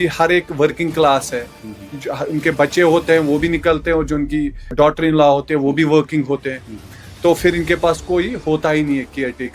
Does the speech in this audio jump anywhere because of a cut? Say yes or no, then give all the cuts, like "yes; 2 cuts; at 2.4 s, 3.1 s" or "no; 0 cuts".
yes; 1 cut; at 4.7 s